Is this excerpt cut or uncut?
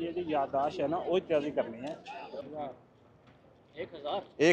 cut